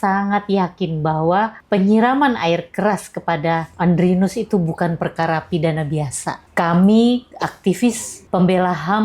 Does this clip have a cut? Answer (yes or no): yes